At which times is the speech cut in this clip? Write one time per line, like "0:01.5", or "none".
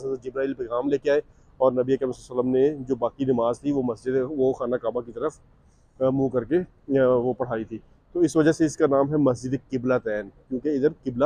none